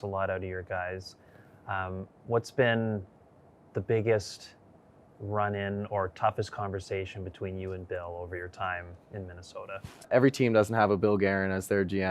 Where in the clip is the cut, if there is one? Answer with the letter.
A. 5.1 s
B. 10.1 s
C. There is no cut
B